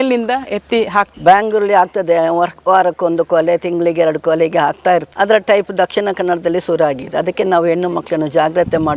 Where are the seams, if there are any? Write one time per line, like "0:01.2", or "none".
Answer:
0:01.1
0:05.1